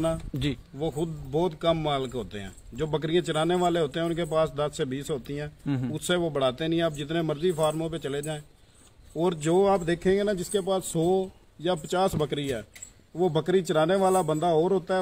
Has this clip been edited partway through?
no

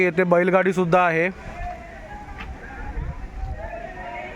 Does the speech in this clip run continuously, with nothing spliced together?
yes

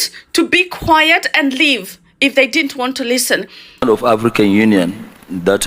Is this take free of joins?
no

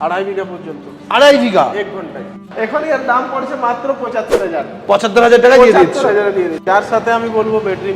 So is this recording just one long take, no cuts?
no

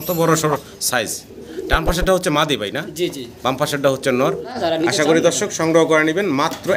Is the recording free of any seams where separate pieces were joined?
no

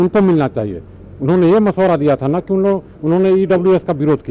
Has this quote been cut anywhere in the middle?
no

